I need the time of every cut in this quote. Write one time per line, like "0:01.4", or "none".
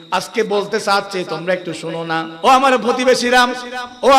0:02.3